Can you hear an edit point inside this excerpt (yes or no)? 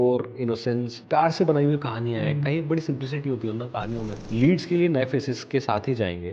yes